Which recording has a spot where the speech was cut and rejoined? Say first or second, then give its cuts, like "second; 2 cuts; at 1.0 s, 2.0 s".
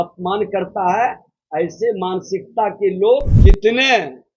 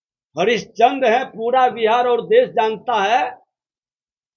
first; 1 cut; at 3.3 s